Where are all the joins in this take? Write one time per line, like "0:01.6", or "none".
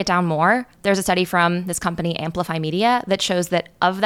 none